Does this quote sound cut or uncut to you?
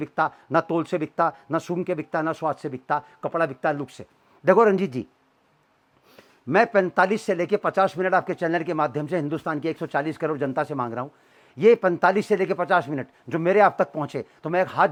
uncut